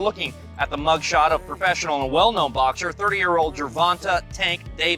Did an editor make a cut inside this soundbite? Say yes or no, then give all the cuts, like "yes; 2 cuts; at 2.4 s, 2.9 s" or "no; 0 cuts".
no; 0 cuts